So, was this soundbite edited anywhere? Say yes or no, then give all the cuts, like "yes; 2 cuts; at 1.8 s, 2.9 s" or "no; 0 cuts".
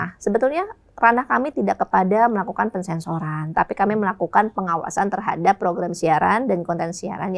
no; 0 cuts